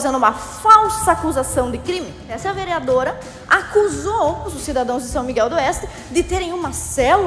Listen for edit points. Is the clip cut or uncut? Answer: cut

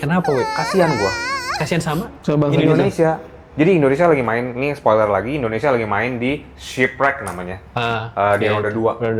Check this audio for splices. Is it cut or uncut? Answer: uncut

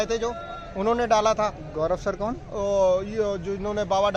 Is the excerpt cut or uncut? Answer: uncut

